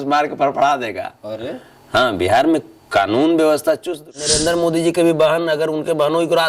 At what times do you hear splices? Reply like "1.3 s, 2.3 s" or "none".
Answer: 4.3 s